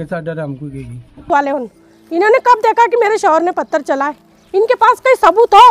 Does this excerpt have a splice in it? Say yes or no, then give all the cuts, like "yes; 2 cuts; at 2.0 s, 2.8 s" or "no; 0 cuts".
yes; 1 cut; at 1.2 s